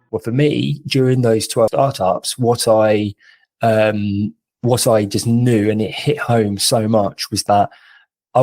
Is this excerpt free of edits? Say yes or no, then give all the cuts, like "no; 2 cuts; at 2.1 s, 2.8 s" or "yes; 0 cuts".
no; 1 cut; at 1.6 s